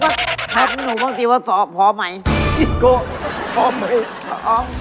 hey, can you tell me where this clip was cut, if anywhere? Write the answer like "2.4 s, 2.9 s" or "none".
none